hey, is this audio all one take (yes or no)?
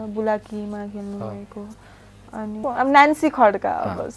no